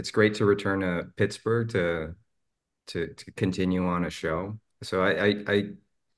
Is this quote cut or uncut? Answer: uncut